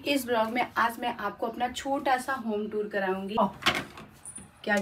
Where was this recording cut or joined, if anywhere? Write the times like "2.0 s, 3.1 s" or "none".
3.4 s